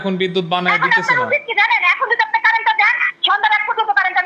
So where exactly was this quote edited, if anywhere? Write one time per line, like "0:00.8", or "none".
none